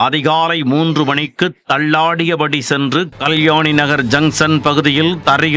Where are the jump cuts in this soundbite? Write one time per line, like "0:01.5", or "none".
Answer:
0:03.1